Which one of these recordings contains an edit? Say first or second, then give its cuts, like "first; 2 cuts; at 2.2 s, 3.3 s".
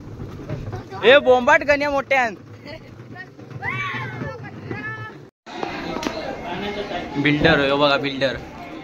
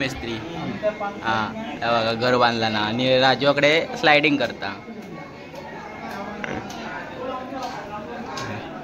first; 1 cut; at 5.4 s